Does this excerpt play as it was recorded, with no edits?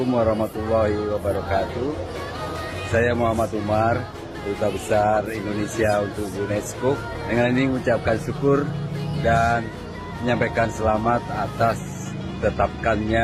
yes; 0 cuts

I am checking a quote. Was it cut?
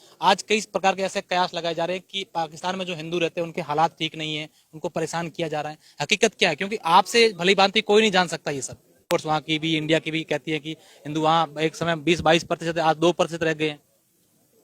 yes; 1 cut; at 9.1 s

